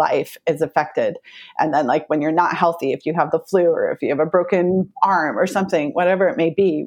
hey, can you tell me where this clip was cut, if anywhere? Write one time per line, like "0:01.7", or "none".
none